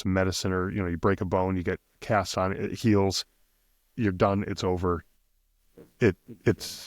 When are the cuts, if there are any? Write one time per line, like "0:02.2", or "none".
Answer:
none